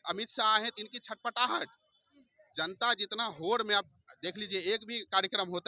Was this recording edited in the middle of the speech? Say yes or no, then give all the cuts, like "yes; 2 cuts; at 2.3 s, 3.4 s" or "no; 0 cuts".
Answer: no; 0 cuts